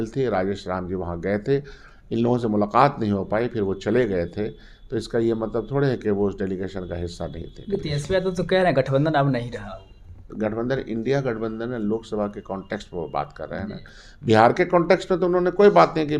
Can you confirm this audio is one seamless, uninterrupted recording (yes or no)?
yes